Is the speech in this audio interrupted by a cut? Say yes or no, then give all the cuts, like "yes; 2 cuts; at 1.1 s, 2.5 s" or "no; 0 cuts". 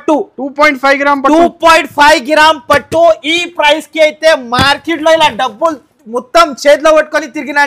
no; 0 cuts